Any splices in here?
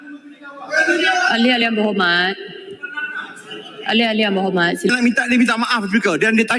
yes; 1 cut; at 4.9 s

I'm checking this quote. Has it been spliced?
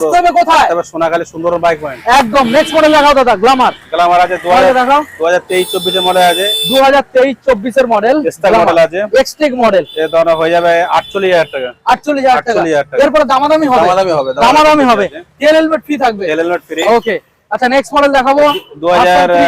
no; 0 cuts

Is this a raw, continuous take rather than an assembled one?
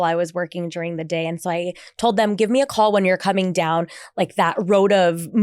yes; 0 cuts

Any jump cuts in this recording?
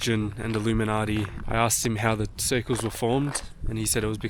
yes; 1 cut; at 1.4 s

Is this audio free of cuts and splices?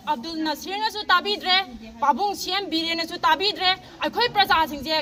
yes; 0 cuts

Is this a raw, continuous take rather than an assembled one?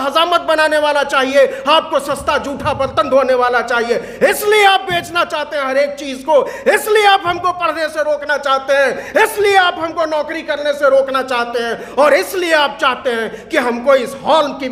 yes; 0 cuts

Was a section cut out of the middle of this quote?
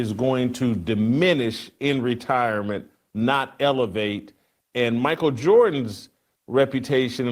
no; 0 cuts

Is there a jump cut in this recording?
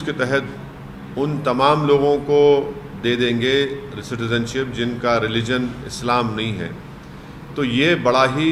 no; 0 cuts

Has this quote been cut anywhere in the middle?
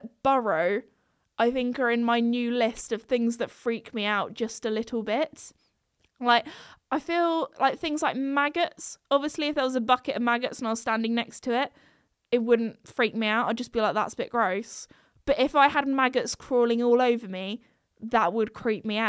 no; 0 cuts

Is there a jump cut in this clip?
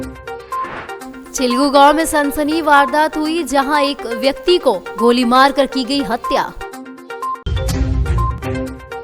yes; 1 cut; at 1.1 s

